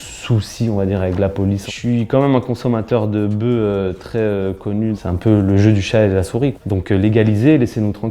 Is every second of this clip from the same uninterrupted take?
no; 3 cuts; at 1.7 s, 5.0 s, 6.6 s

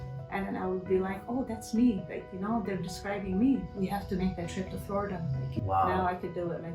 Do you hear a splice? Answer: yes; 2 cuts; at 3.7 s, 5.5 s

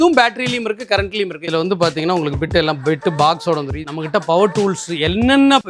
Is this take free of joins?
no; 2 cuts; at 1.4 s, 3.8 s

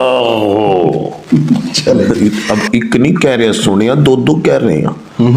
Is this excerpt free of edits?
no; 1 cut; at 2.1 s

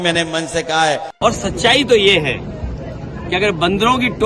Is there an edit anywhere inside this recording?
yes; 1 cut; at 1.1 s

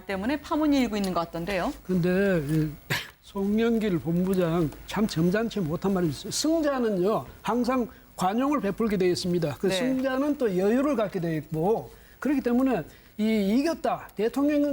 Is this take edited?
yes; 1 cut; at 4.9 s

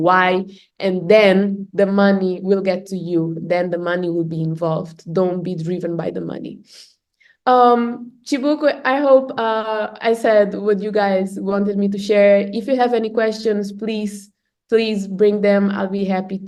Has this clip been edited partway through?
no; 0 cuts

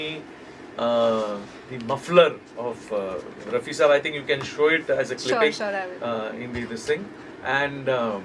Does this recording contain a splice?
no; 0 cuts

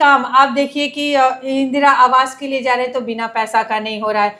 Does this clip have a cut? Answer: no; 0 cuts

